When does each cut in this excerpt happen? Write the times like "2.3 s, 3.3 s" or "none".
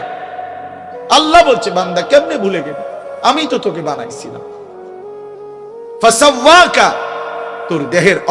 4.3 s, 6.0 s

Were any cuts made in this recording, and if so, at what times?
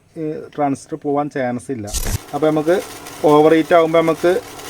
2.0 s

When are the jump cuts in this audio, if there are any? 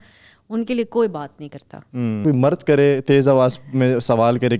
2.2 s

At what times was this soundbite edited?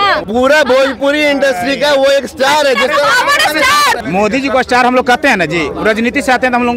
none

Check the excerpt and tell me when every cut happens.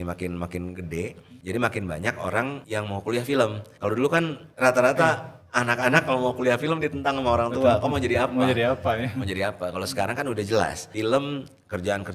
1.3 s, 2.6 s, 3.9 s, 10.8 s

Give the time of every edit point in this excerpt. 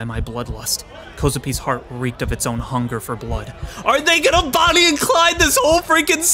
none

